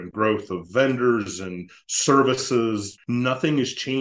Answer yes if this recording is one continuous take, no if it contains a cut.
no